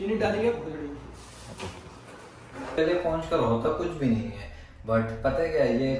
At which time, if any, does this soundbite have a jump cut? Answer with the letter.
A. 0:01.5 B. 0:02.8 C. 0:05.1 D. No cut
B